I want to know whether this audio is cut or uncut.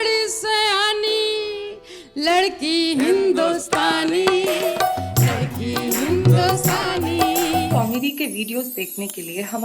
cut